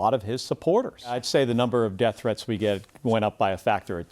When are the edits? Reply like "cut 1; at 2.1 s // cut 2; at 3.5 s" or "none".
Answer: cut 1; at 1.2 s